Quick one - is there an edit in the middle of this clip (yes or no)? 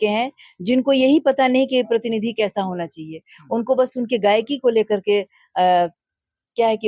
no